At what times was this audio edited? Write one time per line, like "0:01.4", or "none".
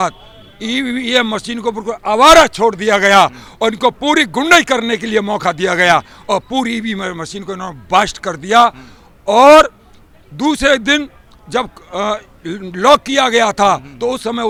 none